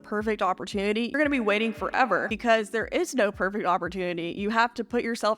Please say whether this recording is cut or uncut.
cut